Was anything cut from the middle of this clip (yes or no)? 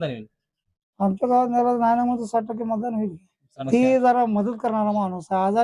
yes